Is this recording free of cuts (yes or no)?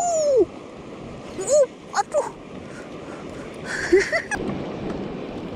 no